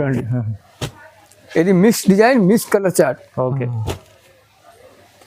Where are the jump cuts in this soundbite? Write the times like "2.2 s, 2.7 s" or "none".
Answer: none